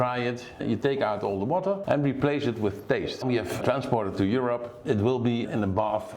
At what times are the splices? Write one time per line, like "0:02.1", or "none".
0:01.8
0:03.2
0:04.7